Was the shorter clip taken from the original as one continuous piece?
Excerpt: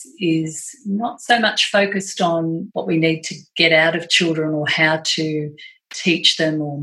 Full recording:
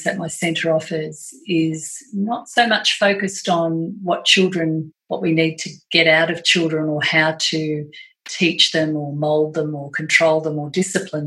no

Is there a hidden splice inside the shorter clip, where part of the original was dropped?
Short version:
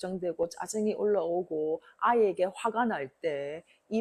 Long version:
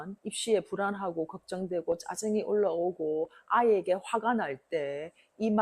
no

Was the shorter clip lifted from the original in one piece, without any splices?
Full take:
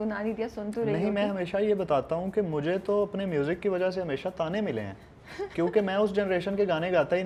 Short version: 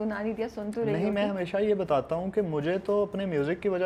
yes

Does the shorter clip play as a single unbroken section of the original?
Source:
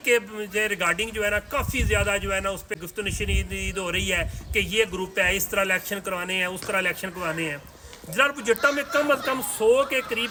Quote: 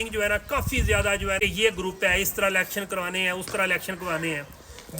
no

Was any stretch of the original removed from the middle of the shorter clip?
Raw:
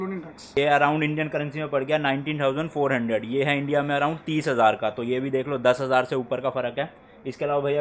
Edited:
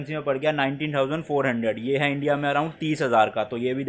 no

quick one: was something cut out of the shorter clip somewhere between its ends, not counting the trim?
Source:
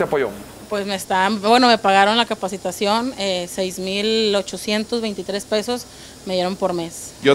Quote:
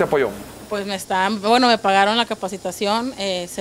no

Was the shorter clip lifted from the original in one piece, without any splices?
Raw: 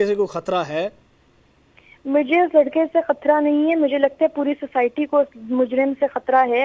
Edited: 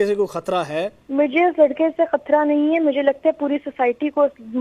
no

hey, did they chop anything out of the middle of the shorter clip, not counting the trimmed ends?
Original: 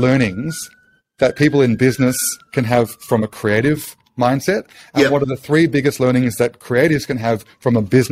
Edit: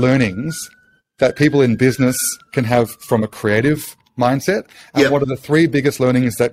no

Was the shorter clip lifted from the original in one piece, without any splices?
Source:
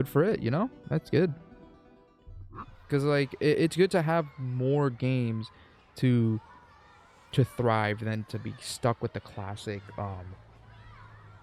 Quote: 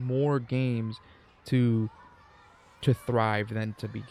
yes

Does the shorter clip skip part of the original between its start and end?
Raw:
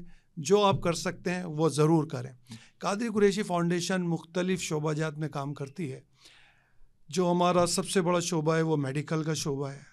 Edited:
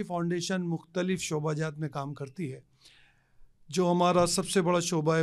no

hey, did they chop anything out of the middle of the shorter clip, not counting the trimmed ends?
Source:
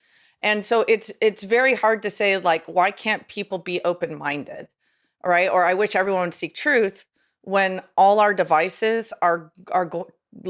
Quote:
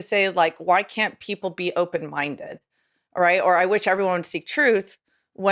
no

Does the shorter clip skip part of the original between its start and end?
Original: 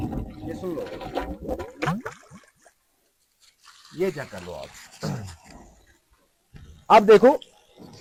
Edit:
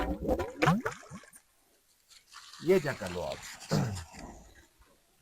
yes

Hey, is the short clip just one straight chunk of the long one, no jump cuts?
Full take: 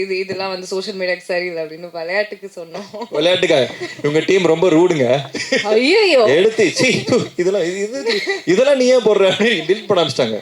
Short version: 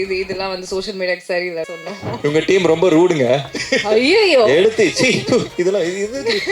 no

